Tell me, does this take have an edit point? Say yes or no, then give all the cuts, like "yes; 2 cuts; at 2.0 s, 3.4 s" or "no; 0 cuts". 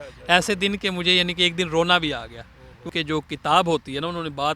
yes; 1 cut; at 2.9 s